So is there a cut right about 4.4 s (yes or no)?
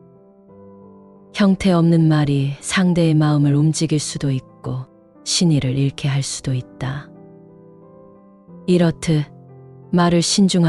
no